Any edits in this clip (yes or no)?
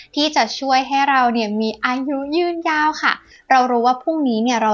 yes